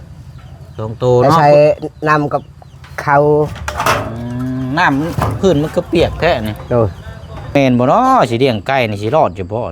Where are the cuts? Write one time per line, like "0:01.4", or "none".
0:07.5